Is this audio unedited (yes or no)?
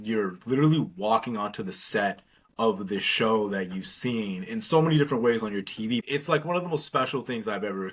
no